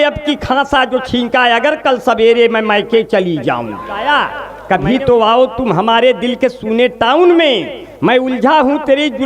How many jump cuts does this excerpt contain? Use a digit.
1